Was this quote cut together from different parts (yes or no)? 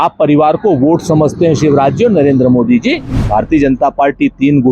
yes